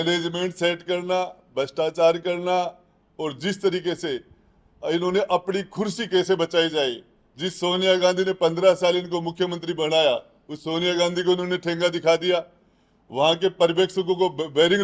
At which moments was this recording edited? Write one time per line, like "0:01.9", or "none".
none